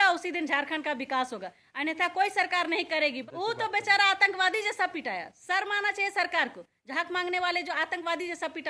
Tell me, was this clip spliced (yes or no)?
yes